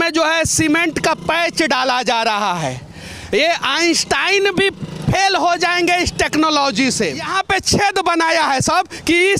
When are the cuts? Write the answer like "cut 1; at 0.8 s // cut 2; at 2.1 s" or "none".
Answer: cut 1; at 7.3 s